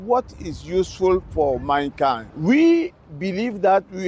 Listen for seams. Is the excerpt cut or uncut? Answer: cut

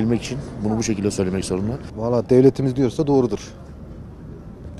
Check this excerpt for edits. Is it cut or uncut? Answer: cut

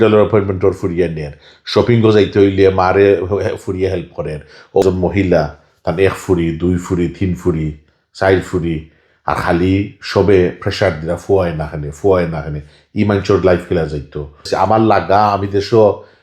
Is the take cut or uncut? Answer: cut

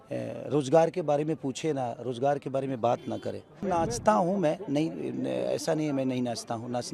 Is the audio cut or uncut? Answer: cut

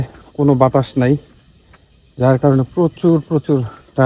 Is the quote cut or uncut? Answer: uncut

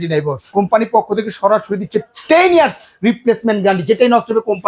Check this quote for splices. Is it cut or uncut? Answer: uncut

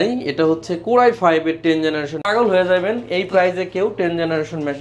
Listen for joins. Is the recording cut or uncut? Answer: cut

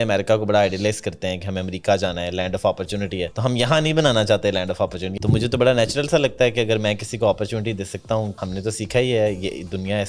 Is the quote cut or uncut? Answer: cut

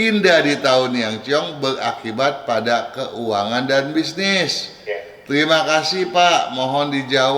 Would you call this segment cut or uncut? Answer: uncut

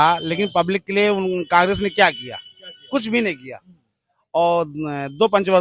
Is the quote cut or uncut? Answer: uncut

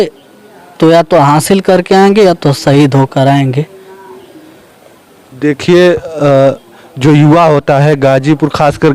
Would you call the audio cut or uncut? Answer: uncut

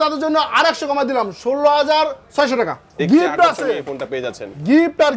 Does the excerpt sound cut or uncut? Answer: cut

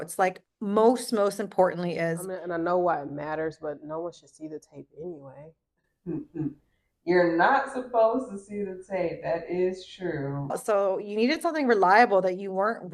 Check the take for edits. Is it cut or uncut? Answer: cut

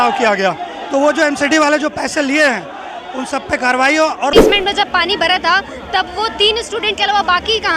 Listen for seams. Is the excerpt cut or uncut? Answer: cut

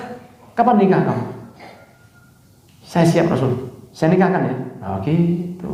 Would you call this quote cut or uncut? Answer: uncut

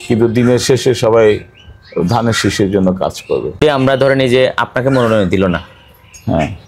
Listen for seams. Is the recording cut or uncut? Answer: cut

